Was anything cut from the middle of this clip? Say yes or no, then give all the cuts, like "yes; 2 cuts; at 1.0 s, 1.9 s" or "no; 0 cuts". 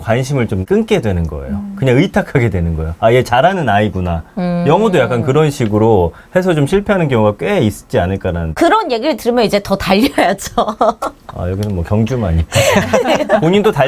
no; 0 cuts